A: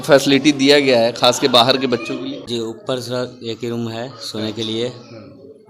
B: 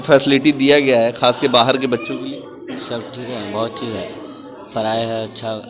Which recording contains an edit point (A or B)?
A